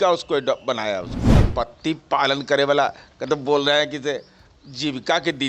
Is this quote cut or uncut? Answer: cut